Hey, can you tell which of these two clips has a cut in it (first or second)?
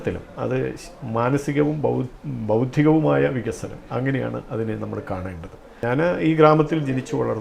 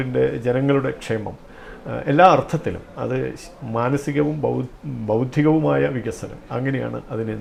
first